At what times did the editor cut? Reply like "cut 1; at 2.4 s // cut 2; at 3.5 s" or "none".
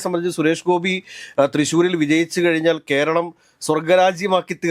none